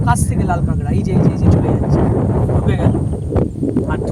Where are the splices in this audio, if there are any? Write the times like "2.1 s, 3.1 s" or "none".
none